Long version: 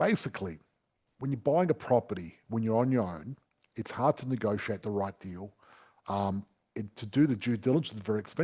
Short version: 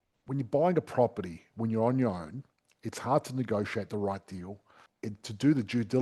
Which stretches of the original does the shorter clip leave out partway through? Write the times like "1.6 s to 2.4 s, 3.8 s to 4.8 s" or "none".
5.8 s to 6.6 s